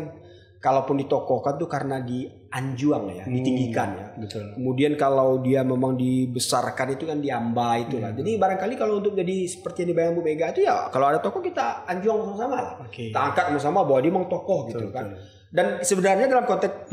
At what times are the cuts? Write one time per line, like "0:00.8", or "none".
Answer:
none